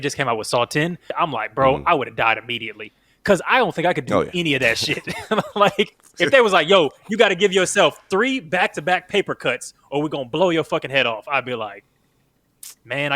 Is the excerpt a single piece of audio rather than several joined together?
no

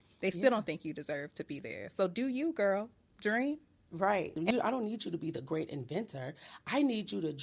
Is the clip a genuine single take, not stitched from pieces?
no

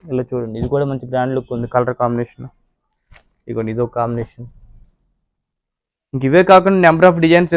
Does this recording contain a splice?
no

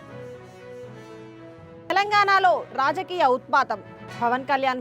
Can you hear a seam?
no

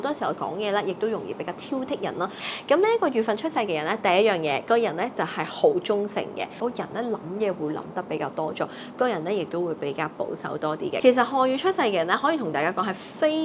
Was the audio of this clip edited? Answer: yes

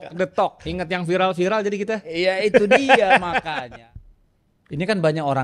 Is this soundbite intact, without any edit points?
no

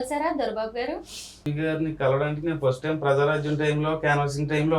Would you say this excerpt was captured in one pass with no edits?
no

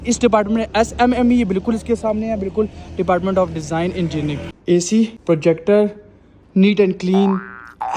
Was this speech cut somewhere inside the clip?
yes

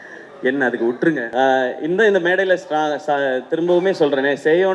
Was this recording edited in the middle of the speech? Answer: yes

